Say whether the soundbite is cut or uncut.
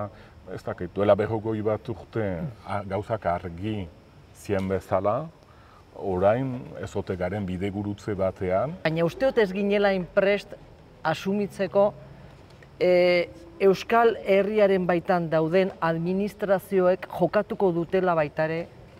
cut